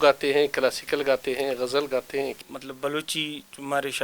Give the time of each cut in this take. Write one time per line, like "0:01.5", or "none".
0:02.4